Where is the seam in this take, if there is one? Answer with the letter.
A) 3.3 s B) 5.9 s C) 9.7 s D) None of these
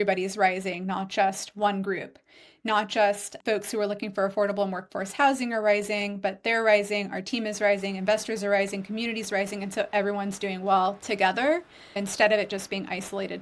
D